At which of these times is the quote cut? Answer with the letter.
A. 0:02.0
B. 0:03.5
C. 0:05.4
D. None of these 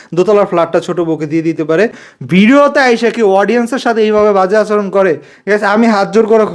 A